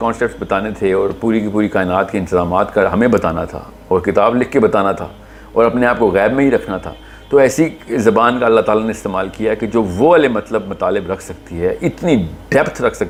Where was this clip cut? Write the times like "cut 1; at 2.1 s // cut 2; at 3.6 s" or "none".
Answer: none